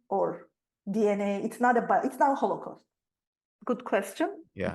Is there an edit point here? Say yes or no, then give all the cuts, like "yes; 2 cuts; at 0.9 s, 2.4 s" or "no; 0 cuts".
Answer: yes; 1 cut; at 3.5 s